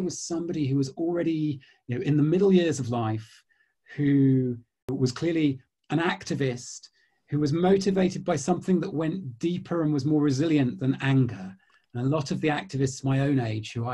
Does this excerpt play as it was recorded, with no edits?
no; 1 cut; at 4.8 s

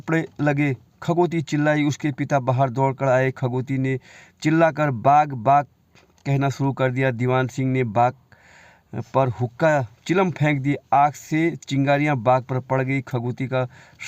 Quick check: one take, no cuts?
yes; 0 cuts

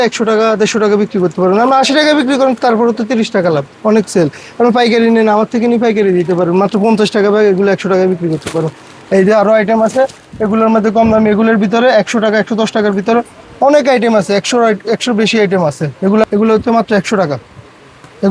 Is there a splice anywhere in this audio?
no; 0 cuts

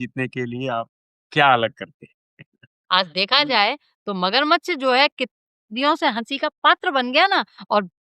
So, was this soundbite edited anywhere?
yes; 1 cut; at 2.8 s

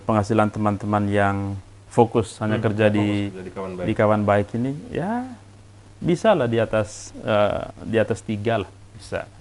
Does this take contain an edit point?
no; 0 cuts

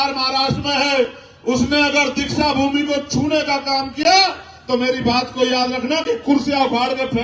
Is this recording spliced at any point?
no; 0 cuts

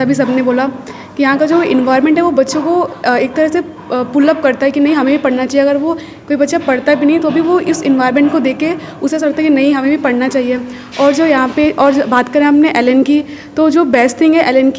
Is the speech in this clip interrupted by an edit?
no; 0 cuts

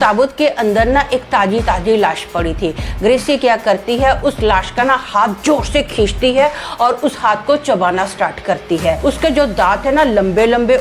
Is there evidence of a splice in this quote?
yes; 1 cut; at 9.0 s

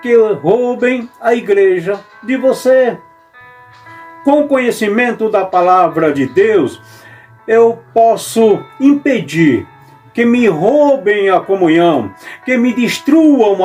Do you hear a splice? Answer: no; 0 cuts

